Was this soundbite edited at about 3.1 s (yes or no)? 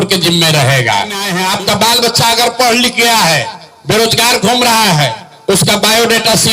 no